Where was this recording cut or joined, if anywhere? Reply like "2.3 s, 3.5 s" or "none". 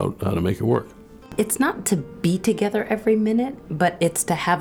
1.3 s, 3.6 s